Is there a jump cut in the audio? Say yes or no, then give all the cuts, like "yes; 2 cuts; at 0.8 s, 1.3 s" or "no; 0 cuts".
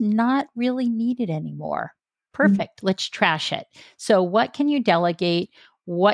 no; 0 cuts